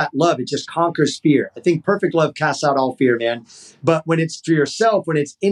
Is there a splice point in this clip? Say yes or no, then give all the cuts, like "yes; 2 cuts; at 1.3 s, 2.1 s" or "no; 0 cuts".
no; 0 cuts